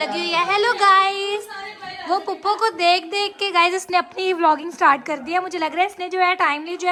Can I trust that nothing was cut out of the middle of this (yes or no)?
yes